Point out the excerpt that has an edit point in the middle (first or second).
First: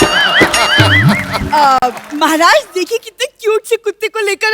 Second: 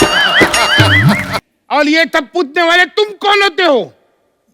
second